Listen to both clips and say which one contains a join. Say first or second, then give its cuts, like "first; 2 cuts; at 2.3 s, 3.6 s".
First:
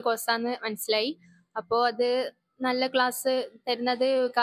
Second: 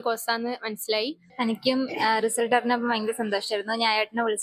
second; 1 cut; at 1.2 s